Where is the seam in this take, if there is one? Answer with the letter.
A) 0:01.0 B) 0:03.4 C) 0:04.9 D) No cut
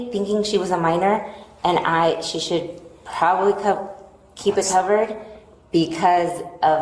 B